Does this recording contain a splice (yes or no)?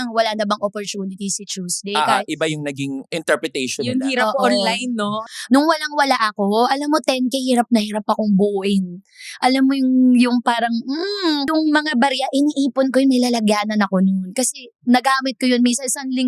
yes